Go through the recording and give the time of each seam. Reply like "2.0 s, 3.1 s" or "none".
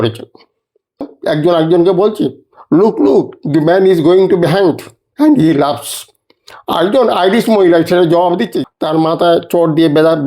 1.2 s, 8.5 s